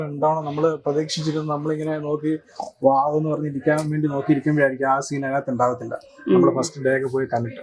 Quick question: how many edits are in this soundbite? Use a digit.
0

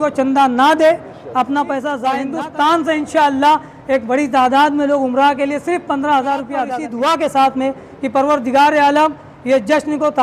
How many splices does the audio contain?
2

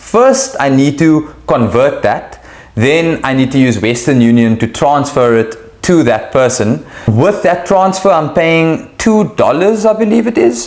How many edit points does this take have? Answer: 1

